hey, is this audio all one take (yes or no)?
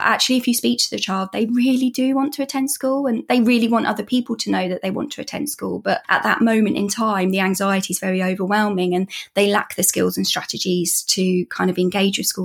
yes